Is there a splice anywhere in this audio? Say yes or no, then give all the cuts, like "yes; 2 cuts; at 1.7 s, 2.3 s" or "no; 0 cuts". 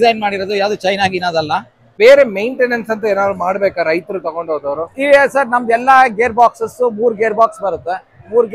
yes; 1 cut; at 1.9 s